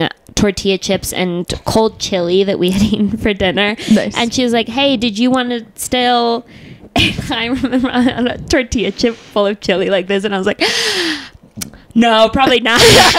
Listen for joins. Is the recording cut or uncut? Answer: uncut